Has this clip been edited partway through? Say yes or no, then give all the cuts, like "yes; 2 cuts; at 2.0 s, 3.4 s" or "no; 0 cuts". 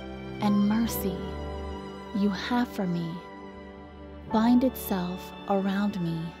no; 0 cuts